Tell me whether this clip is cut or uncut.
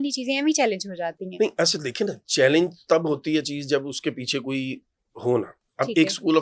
uncut